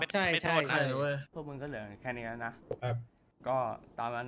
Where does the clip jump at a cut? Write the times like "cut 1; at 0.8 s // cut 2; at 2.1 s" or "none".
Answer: cut 1; at 1.3 s // cut 2; at 2.6 s